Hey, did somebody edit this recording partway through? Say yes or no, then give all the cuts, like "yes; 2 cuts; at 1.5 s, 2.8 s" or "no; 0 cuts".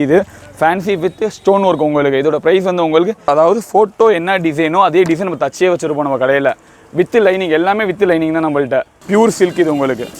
yes; 2 cuts; at 3.3 s, 9.0 s